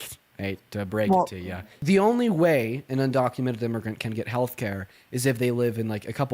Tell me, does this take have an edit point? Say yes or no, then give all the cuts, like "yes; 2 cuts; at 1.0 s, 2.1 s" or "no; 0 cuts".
yes; 1 cut; at 1.7 s